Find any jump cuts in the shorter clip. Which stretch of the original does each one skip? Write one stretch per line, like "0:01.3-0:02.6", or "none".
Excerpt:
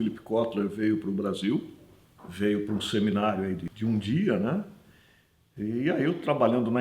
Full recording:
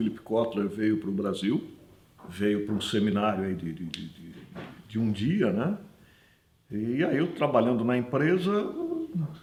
0:03.7-0:04.8